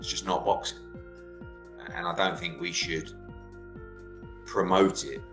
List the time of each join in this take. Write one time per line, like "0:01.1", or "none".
0:03.1
0:04.5

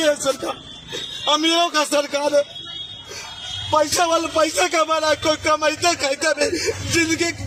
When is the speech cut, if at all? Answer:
none

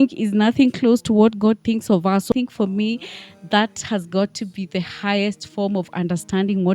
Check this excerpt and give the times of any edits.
0:02.3

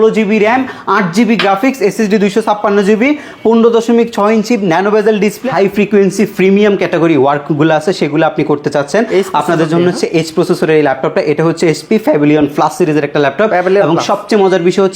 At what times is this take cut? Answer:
0:05.5

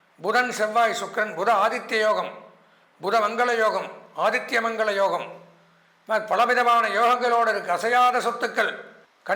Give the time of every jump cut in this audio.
none

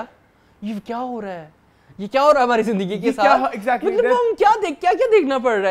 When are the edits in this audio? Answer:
none

